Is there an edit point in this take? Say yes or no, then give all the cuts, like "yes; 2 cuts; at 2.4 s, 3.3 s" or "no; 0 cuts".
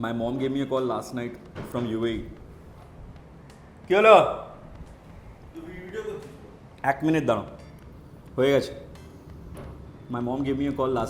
no; 0 cuts